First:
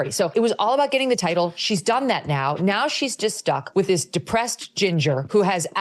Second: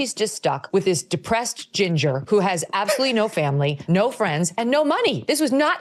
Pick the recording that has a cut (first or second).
first